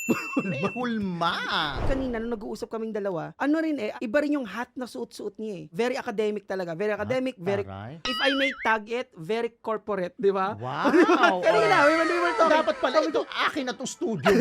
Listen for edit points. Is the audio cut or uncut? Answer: cut